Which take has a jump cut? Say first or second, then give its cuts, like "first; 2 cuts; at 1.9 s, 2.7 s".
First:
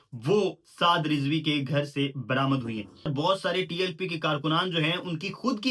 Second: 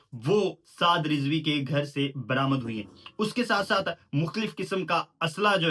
first; 1 cut; at 3.1 s